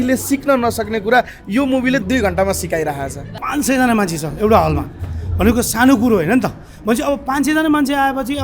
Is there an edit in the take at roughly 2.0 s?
yes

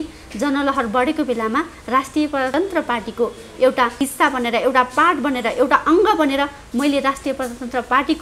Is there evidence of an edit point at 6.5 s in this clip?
no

